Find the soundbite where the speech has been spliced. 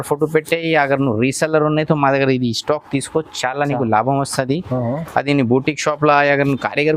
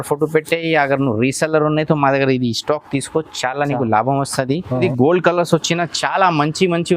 second; 1 cut; at 4.8 s

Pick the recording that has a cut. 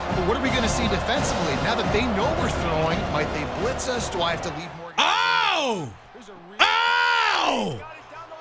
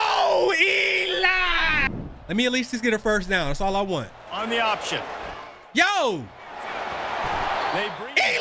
second; 1 cut; at 1.9 s

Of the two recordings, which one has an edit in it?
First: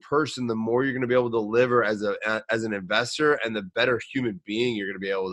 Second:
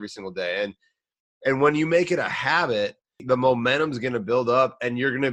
second; 1 cut; at 3.2 s

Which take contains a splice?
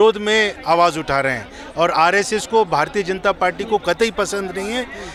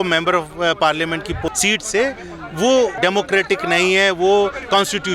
second; 2 cuts; at 1.5 s, 3.0 s

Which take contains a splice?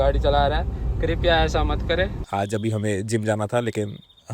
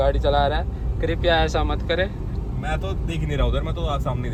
first; 1 cut; at 2.2 s

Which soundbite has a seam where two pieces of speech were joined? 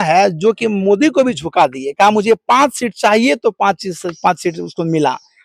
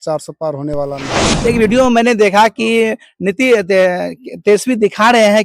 second; 1 cut; at 1.2 s

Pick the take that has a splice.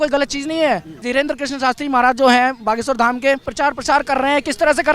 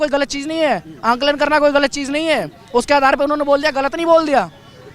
first; 2 cuts; at 1.0 s, 3.5 s

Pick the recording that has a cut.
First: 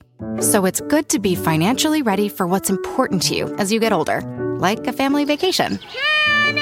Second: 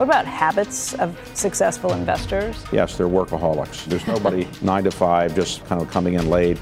second; 3 cuts; at 2.6 s, 4.1 s, 5.6 s

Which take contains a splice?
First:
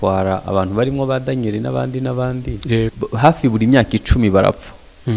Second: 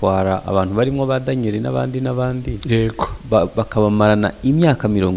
first; 1 cut; at 2.9 s

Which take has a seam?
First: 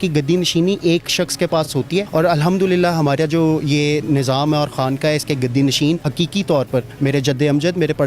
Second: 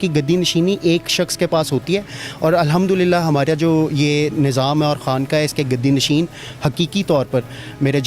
first; 3 cuts; at 1.7 s, 6.1 s, 6.9 s

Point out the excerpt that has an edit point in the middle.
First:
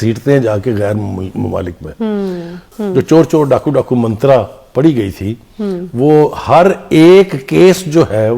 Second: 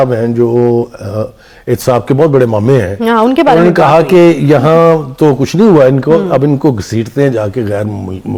first; 1 cut; at 2.6 s

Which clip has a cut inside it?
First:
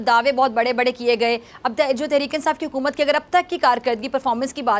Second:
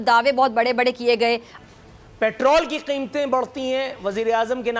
second; 1 cut; at 1.5 s

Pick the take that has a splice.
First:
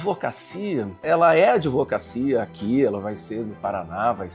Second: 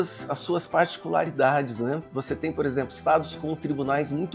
first; 1 cut; at 1.0 s

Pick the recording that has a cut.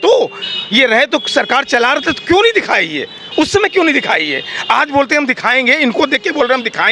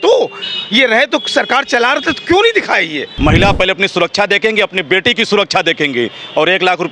second; 1 cut; at 3.0 s

